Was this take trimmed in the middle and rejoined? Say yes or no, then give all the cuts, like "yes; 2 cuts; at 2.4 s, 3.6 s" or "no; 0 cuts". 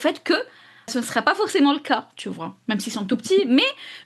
yes; 1 cut; at 0.9 s